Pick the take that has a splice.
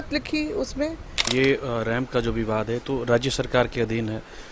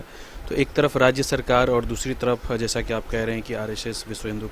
first; 1 cut; at 1.3 s

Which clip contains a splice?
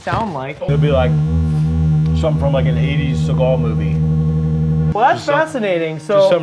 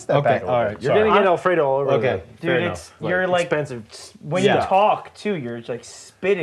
first; 2 cuts; at 0.7 s, 4.9 s

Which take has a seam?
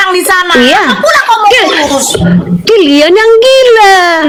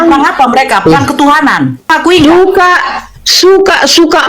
second; 1 cut; at 1.9 s

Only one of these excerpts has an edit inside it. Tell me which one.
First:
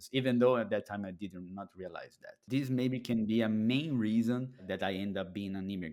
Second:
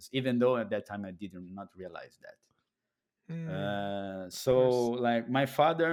first; 2 cuts; at 2.4 s, 4.6 s

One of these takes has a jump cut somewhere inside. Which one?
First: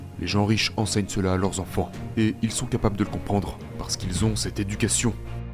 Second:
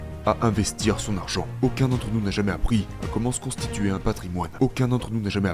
first; 1 cut; at 2.0 s

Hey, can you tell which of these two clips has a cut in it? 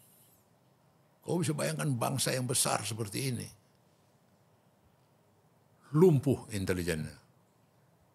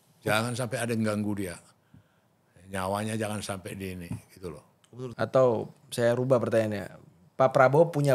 second; 1 cut; at 5.1 s

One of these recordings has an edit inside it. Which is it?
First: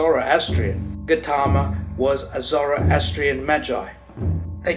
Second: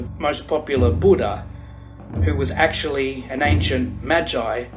first; 1 cut; at 1.0 s

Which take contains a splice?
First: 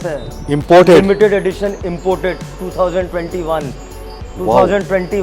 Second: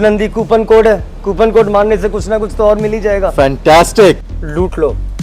second; 1 cut; at 4.2 s

